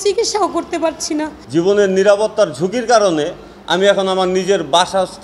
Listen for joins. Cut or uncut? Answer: cut